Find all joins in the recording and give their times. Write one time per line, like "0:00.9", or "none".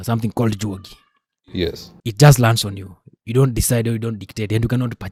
none